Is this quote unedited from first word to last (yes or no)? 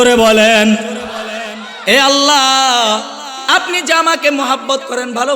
no